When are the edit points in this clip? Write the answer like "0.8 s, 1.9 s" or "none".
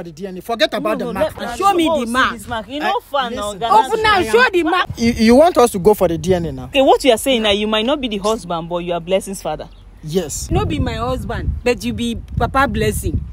1.3 s, 4.8 s, 6.7 s, 10.4 s